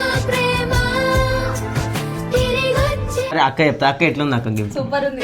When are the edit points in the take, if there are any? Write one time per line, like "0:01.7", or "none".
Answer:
0:03.3